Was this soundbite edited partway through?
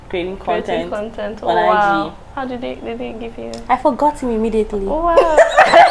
no; 0 cuts

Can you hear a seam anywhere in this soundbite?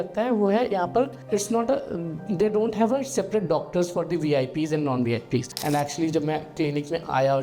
yes; 1 cut; at 5.5 s

